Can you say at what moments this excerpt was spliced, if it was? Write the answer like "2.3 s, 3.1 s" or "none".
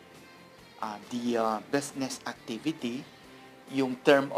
none